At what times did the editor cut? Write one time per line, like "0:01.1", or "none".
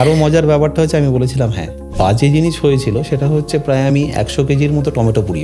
0:01.8